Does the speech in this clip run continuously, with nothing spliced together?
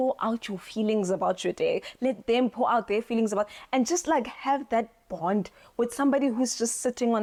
yes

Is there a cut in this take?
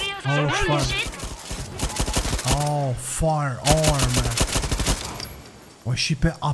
no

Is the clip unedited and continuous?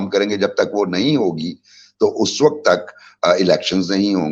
yes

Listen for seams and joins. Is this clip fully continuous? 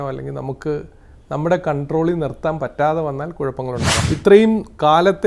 no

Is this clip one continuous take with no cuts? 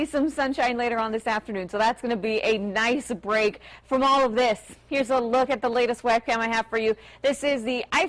yes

